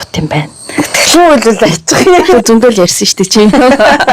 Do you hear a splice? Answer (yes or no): yes